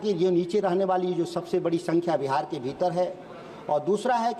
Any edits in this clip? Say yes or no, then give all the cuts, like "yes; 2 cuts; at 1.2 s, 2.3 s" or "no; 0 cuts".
no; 0 cuts